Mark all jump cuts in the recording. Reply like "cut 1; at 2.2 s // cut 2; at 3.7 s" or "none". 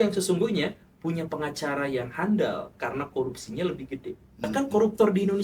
cut 1; at 4.5 s